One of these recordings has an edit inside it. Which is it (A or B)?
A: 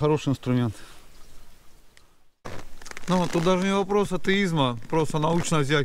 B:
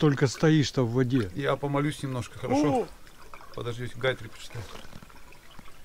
A